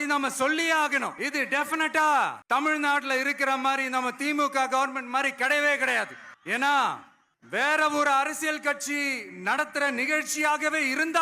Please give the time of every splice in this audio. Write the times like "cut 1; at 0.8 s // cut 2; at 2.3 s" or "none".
cut 1; at 1.2 s